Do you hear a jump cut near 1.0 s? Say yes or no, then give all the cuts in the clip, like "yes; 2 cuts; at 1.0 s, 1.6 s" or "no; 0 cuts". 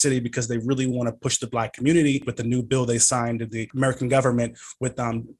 no; 2 cuts; at 2.3 s, 3.6 s